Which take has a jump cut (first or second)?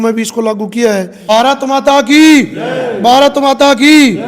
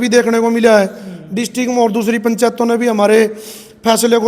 first